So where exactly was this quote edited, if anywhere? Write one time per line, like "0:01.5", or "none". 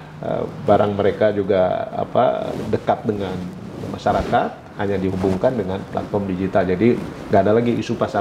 none